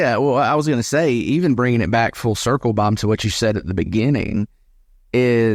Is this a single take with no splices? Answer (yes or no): yes